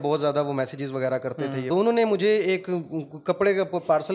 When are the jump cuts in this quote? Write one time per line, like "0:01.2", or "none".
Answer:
0:01.7